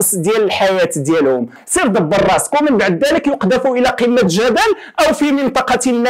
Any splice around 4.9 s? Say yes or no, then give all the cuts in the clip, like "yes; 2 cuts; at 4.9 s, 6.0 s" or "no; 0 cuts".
no; 1 cut; at 1.6 s